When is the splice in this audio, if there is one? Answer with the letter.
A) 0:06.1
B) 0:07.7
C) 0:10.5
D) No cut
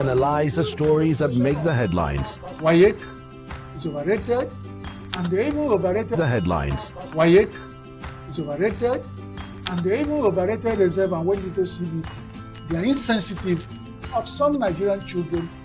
A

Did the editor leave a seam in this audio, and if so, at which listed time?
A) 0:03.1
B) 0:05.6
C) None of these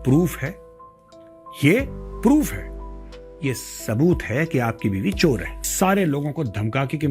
B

